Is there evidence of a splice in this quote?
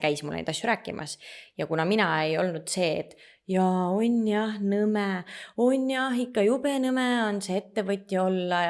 no; 0 cuts

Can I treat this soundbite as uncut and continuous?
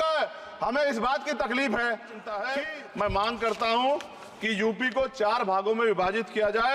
no; 1 cut; at 2.3 s

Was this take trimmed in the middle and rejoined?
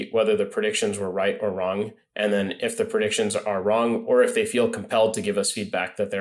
no; 0 cuts

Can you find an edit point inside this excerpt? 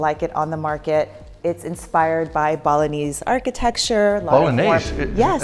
no; 0 cuts

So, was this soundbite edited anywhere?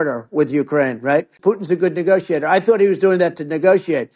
yes; 1 cut; at 1.4 s

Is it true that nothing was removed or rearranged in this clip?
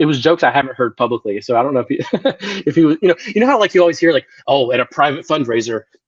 yes; 0 cuts

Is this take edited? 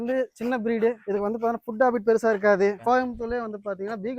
yes; 2 cuts; at 1.0 s, 2.8 s

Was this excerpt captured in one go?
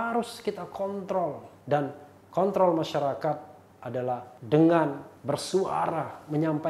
no; 3 cuts; at 1.7 s, 4.0 s, 5.1 s

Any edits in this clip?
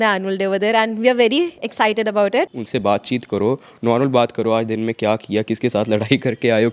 yes; 1 cut; at 2.5 s

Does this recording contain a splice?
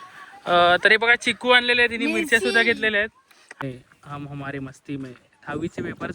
yes; 1 cut; at 3.6 s

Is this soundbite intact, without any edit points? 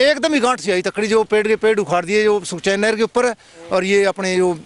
yes; 0 cuts

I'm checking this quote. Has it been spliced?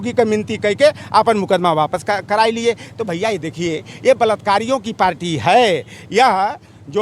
no; 0 cuts

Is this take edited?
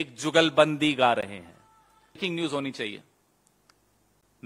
yes; 1 cut; at 2.2 s

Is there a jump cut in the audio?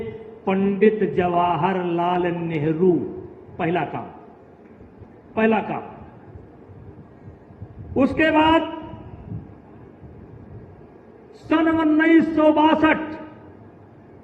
no; 0 cuts

